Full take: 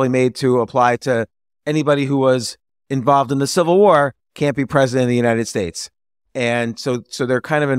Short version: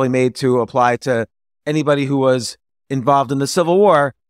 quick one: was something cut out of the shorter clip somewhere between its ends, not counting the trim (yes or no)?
no